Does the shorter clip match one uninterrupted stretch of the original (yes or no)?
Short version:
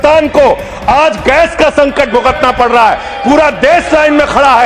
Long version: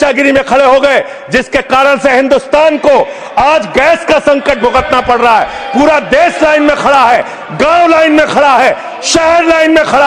yes